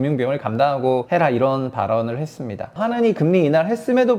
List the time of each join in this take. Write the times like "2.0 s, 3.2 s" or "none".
1.0 s, 2.7 s

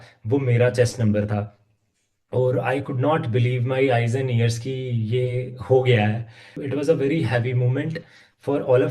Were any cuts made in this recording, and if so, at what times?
6.6 s

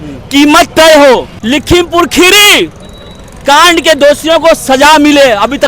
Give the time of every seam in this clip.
1.3 s

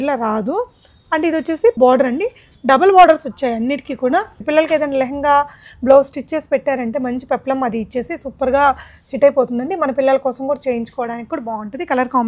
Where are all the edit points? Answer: 1.8 s, 4.4 s

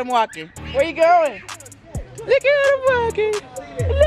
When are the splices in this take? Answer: none

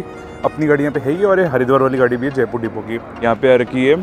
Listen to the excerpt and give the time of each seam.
3.1 s

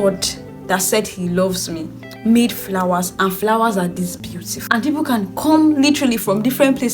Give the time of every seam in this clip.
4.7 s

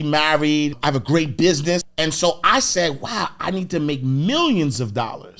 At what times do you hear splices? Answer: 0.8 s, 1.8 s

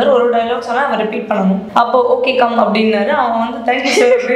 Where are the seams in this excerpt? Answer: 1.6 s

